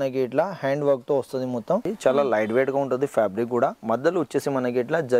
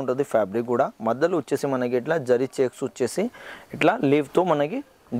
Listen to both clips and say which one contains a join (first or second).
first